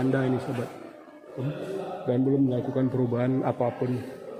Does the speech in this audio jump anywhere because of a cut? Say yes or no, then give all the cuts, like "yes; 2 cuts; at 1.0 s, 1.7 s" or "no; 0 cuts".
no; 0 cuts